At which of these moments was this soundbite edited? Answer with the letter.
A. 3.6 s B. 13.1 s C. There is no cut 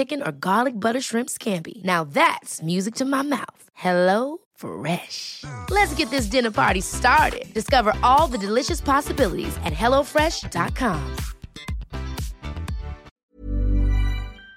B